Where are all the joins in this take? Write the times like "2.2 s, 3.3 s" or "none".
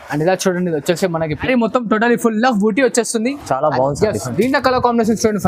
1.4 s